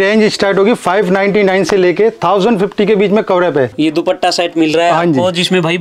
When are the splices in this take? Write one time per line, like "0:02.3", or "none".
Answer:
0:03.7